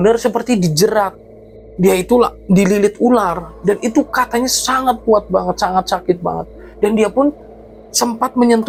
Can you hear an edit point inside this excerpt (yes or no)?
no